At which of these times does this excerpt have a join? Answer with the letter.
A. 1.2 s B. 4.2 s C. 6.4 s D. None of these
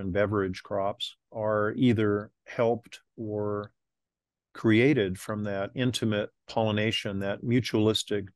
A